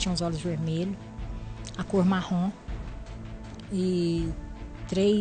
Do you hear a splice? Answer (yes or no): no